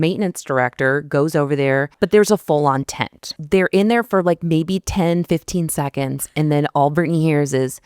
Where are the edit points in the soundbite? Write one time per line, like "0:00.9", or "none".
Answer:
0:01.9
0:03.3